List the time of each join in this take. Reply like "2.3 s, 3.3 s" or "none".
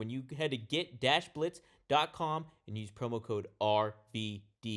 none